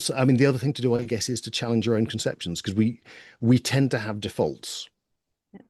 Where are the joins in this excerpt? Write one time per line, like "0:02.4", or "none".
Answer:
none